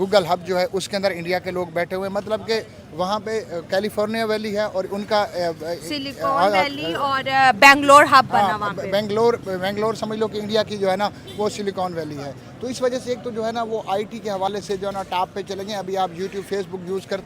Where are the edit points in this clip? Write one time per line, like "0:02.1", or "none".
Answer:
none